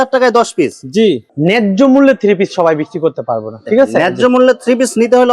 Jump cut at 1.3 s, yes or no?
yes